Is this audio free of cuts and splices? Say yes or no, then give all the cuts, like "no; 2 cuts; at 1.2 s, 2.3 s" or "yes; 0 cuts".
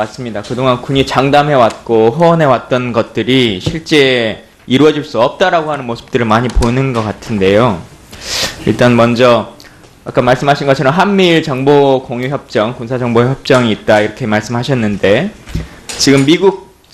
yes; 0 cuts